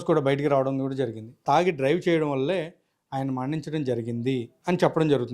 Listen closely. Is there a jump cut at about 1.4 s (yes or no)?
yes